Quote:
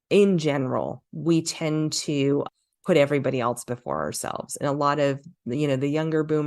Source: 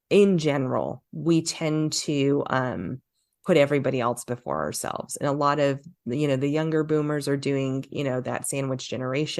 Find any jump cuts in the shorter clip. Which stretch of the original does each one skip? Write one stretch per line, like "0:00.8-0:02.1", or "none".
0:02.5-0:03.1